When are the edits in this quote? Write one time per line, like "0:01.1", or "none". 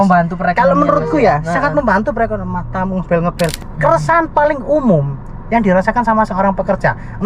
0:03.6